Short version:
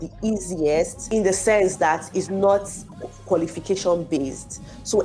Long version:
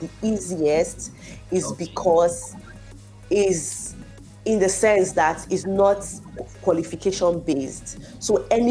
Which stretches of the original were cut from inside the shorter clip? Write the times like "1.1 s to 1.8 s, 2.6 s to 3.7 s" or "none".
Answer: 1.0 s to 4.3 s